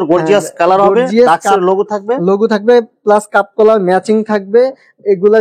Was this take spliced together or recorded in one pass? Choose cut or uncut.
uncut